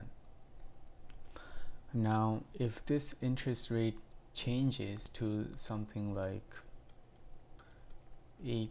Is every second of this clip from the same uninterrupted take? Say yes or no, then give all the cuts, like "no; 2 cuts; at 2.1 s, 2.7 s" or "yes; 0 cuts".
no; 1 cut; at 5.1 s